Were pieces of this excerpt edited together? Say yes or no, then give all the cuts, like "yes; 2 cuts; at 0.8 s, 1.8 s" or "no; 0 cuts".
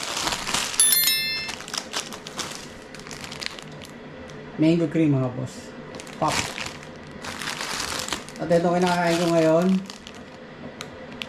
yes; 1 cut; at 4.3 s